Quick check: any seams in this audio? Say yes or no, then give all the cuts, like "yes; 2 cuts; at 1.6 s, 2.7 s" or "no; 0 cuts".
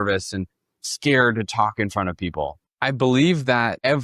yes; 1 cut; at 2.6 s